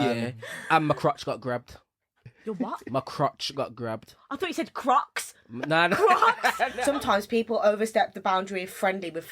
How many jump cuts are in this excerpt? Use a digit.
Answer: 1